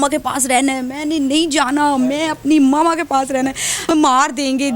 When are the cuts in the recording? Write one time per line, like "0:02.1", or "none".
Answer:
0:03.9